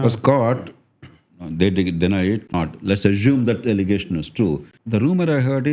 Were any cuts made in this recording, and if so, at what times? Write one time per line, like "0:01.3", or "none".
0:02.5
0:04.7